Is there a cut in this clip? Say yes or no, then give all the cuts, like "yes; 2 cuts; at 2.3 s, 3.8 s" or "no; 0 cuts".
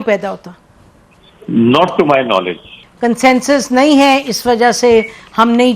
yes; 1 cut; at 2.8 s